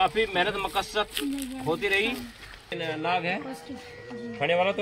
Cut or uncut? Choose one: cut